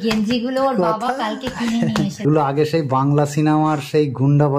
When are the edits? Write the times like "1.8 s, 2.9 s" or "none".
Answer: 2.2 s